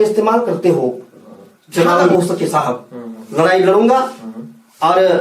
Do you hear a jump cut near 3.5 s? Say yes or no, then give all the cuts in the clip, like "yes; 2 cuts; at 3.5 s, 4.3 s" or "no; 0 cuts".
no; 1 cut; at 2.1 s